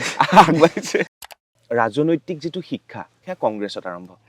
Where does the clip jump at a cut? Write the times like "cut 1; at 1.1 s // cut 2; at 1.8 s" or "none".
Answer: cut 1; at 1.3 s // cut 2; at 3.2 s